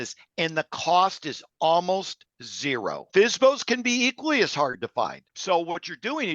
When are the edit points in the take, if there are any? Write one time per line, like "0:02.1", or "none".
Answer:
0:03.0
0:05.3